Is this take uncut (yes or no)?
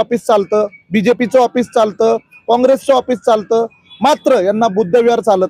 yes